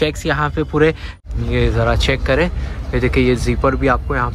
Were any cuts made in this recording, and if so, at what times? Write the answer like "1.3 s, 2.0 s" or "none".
1.1 s